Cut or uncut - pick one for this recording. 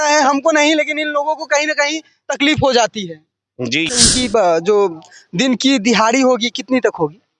cut